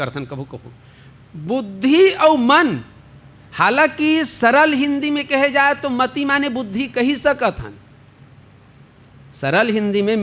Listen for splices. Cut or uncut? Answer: uncut